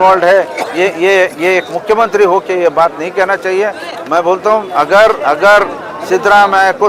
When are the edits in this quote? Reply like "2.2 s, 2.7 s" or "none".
none